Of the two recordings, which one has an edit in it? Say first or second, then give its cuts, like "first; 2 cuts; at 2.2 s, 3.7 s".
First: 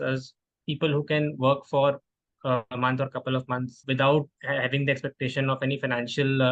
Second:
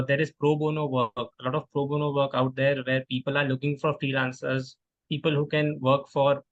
first; 1 cut; at 3.8 s